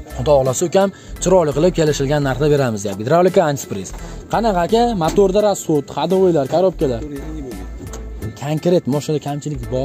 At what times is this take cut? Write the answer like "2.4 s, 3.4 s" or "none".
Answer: none